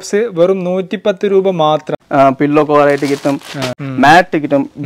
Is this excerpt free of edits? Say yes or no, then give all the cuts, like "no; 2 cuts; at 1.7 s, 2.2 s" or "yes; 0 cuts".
no; 2 cuts; at 2.0 s, 3.7 s